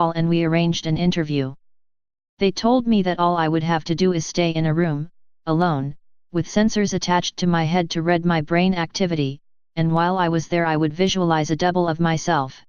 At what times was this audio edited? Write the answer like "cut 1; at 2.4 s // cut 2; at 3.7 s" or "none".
cut 1; at 10.2 s